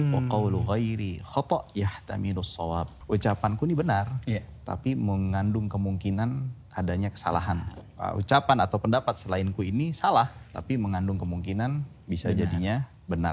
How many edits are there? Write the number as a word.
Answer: two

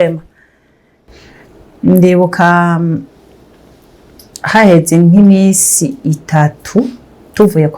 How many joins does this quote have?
one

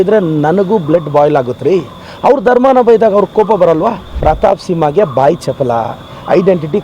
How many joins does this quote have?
one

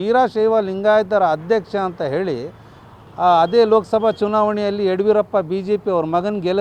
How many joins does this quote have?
zero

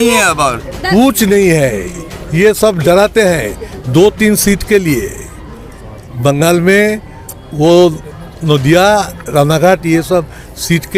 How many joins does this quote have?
zero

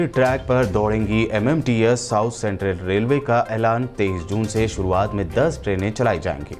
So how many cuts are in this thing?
zero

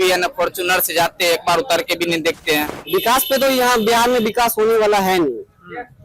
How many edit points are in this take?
one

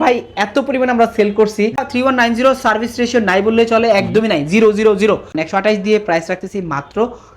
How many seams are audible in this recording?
two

